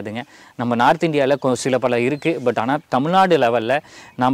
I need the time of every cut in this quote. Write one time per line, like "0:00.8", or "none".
none